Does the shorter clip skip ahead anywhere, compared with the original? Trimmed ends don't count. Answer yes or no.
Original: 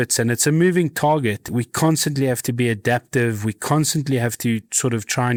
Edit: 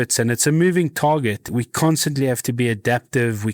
no